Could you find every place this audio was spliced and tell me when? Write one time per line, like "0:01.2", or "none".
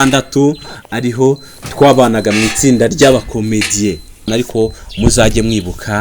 0:04.3